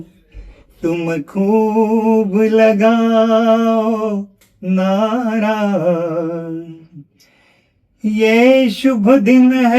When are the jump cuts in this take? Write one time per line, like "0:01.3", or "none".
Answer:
none